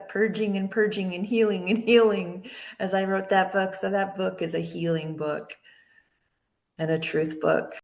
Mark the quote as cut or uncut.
uncut